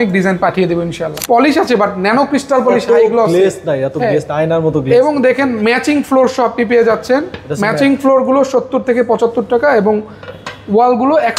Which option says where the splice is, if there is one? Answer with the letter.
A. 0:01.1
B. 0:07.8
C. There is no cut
A